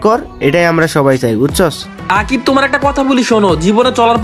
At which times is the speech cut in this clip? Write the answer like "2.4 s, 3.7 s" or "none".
1.9 s